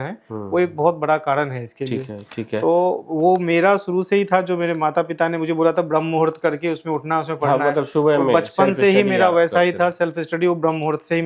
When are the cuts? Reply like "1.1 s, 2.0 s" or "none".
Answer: none